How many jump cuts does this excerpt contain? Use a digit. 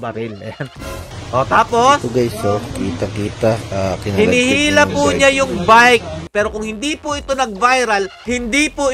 2